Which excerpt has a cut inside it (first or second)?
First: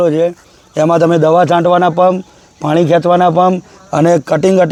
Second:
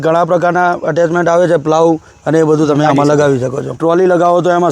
second